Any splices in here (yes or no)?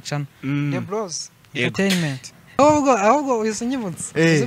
yes